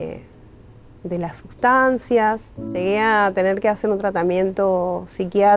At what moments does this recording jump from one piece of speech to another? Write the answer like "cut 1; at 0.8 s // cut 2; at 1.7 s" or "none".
cut 1; at 2.7 s